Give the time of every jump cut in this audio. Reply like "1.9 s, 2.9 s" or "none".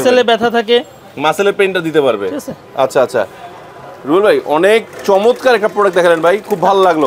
none